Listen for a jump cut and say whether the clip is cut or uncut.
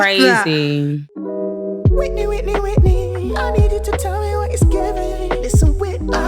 cut